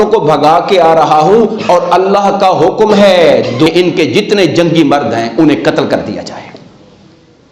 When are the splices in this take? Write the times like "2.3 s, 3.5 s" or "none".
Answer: 3.7 s